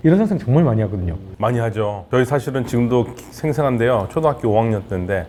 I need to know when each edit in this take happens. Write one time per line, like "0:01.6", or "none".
none